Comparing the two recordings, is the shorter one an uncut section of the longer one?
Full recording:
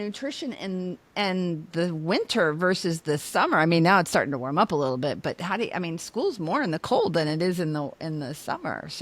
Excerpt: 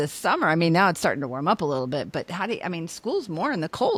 yes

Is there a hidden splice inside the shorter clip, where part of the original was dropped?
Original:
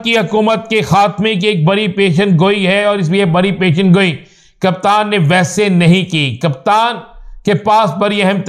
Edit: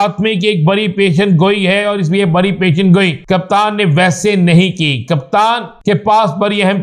yes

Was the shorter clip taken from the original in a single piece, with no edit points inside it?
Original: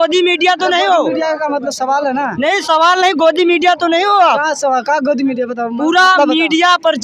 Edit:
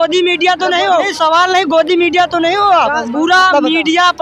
no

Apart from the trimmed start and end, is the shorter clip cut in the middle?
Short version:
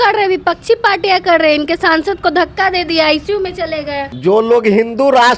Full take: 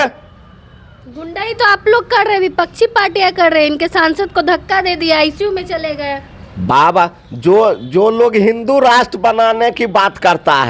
yes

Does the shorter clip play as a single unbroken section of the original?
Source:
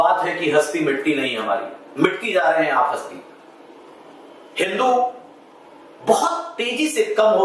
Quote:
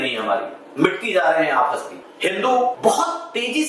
no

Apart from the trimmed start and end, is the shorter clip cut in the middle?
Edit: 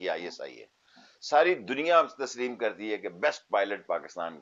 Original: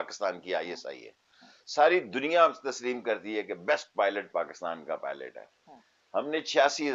no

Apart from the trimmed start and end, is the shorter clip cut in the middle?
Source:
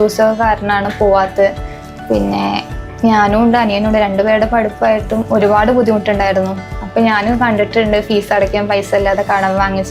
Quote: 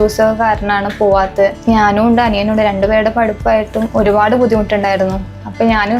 yes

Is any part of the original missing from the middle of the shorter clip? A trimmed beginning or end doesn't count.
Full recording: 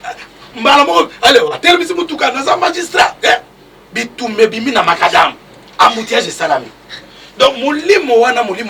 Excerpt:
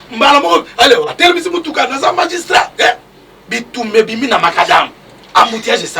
no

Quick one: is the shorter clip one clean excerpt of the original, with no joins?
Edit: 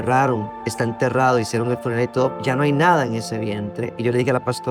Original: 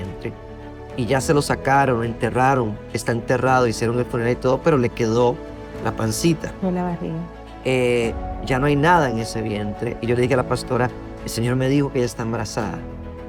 no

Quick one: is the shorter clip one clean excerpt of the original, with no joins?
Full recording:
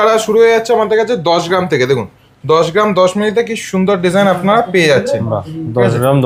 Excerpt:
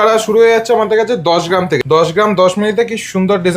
no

